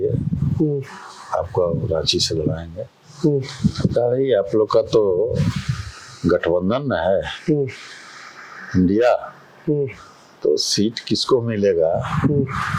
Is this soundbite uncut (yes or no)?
yes